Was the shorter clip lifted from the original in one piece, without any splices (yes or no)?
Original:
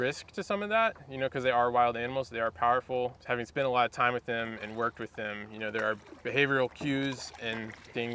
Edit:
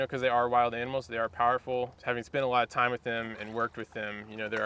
yes